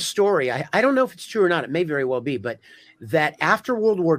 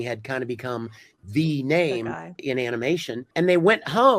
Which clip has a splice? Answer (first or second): second